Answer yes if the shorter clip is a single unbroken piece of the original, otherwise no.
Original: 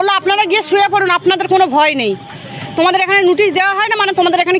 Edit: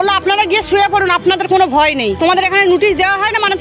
no